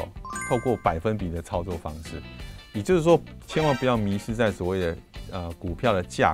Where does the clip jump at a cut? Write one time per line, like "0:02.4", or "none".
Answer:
none